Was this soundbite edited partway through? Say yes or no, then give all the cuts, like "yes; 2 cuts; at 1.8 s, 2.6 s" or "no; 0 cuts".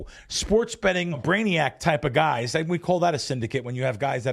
yes; 1 cut; at 1.2 s